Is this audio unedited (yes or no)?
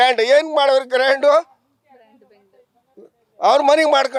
yes